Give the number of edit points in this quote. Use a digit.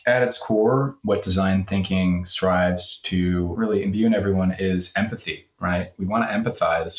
2